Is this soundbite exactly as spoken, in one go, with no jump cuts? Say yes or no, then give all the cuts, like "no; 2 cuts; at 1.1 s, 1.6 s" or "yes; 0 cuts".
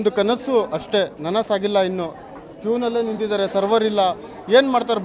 no; 1 cut; at 1.2 s